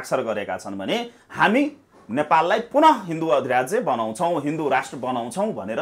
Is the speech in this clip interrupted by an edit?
no; 0 cuts

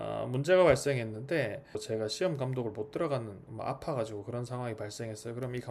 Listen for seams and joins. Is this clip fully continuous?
no; 1 cut; at 1.8 s

